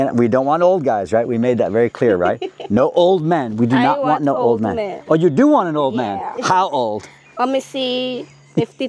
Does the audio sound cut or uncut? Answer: uncut